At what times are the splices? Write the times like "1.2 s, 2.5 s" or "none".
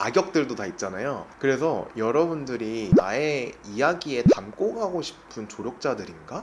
none